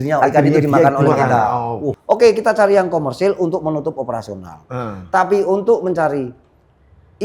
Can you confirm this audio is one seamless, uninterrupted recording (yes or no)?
no